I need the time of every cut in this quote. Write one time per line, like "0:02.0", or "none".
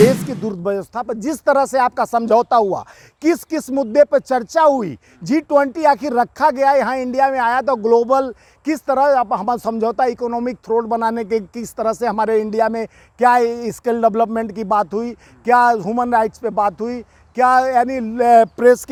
none